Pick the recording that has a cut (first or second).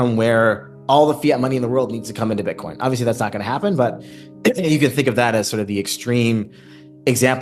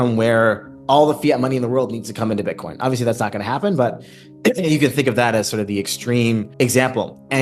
second